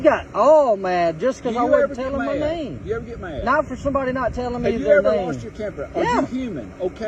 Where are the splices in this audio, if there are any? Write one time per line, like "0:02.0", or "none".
none

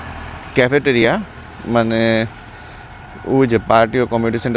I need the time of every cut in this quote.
none

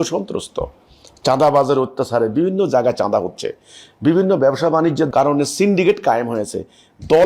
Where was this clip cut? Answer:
0:05.1

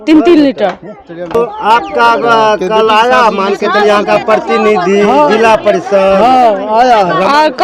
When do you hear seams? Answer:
none

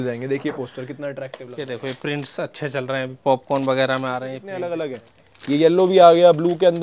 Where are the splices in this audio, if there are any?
0:01.4
0:04.7

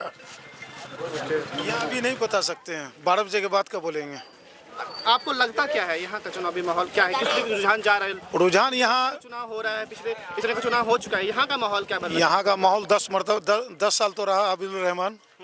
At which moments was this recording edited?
0:01.9

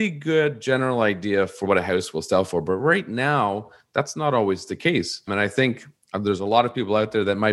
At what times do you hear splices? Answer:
0:01.6
0:05.3

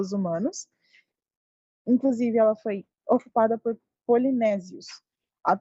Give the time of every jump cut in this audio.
0:01.5

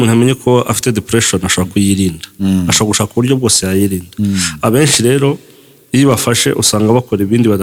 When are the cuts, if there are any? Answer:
none

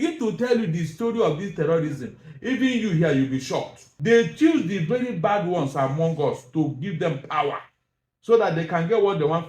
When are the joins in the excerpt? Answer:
0:03.9

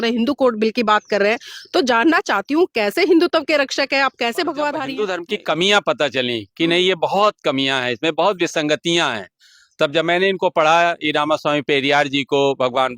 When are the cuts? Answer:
0:05.0

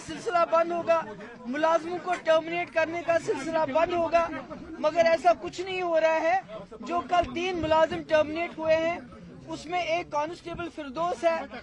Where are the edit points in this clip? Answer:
none

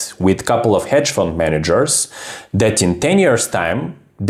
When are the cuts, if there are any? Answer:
none

